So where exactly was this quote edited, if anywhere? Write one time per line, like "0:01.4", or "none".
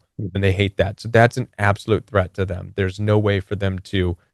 none